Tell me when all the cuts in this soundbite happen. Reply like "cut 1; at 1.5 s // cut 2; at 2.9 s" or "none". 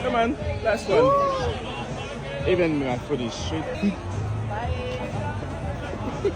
cut 1; at 3.7 s